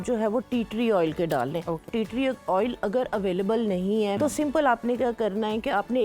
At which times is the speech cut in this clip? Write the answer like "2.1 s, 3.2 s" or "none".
1.9 s, 4.2 s